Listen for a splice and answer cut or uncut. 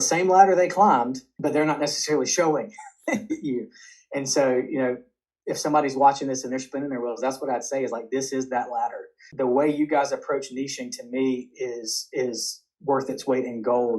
cut